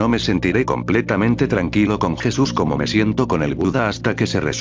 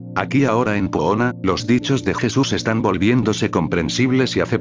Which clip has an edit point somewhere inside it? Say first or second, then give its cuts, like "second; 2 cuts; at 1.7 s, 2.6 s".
first; 1 cut; at 3.7 s